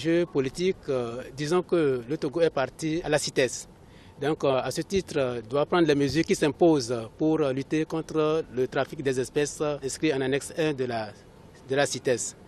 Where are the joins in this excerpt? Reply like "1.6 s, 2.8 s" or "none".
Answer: 3.0 s, 9.9 s